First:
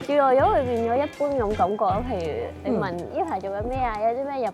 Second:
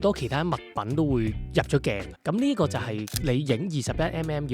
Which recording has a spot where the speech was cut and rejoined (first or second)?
second